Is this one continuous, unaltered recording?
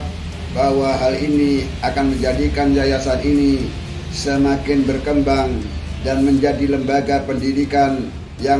yes; 0 cuts

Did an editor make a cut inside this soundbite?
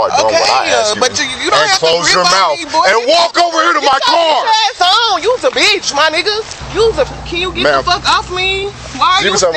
yes; 1 cut; at 7.1 s

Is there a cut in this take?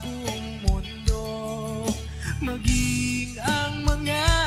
no; 0 cuts

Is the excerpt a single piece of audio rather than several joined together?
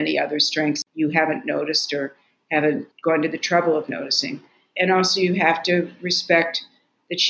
no; 3 cuts; at 0.8 s, 2.9 s, 4.7 s

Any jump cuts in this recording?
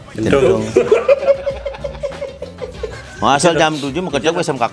yes; 1 cut; at 3.0 s

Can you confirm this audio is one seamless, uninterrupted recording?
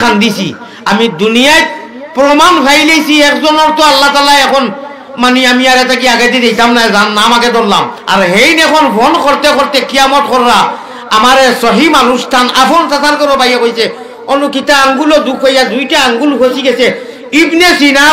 no; 1 cut; at 8.0 s

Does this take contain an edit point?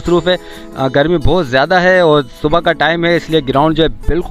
no; 0 cuts

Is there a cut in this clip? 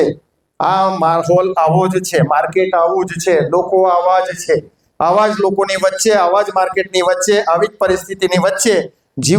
no; 0 cuts

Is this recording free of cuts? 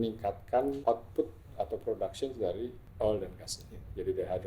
no; 2 cuts; at 0.8 s, 2.8 s

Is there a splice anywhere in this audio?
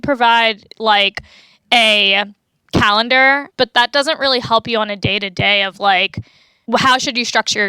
yes; 2 cuts; at 2.4 s, 3.5 s

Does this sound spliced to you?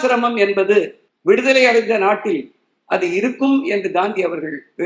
yes; 1 cut; at 1.0 s

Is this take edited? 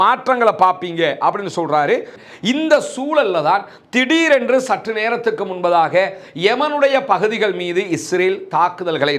yes; 1 cut; at 2.1 s

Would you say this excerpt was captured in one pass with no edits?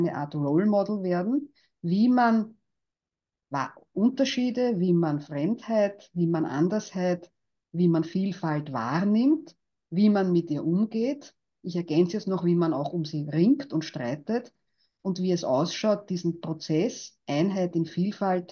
yes; 0 cuts

